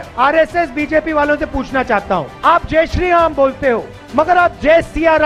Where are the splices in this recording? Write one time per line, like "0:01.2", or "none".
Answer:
none